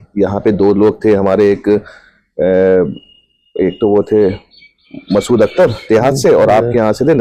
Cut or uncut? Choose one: uncut